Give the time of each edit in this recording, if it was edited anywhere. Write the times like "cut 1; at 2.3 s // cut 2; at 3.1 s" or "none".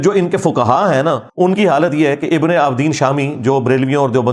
cut 1; at 1.3 s